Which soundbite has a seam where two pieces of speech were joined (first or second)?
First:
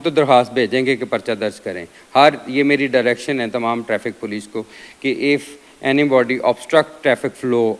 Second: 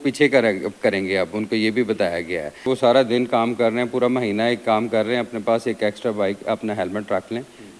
second